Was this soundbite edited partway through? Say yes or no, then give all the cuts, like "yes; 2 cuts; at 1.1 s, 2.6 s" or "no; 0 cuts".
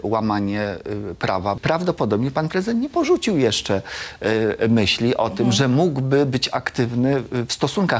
yes; 1 cut; at 1.6 s